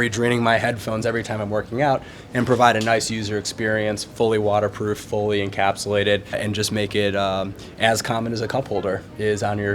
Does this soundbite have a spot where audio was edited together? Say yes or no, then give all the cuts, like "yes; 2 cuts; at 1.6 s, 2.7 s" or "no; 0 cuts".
yes; 1 cut; at 6.4 s